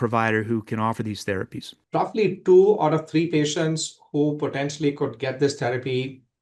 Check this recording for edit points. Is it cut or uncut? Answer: cut